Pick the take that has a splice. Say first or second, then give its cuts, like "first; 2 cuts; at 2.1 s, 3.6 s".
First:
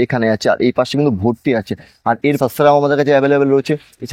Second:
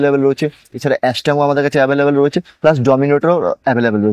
first; 1 cut; at 2.4 s